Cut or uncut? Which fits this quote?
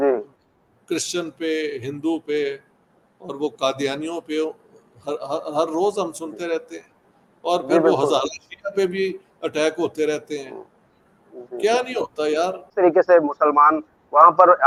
uncut